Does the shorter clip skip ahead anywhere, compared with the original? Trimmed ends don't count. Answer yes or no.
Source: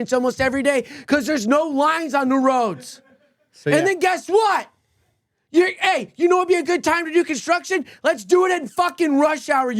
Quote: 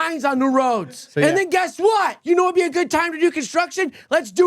yes